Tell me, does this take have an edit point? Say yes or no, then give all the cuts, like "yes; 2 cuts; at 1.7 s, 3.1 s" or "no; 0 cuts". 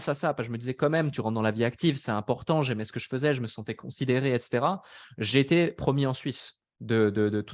no; 0 cuts